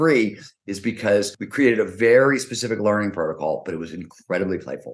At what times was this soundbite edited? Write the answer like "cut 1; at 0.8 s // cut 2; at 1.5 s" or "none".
cut 1; at 1.4 s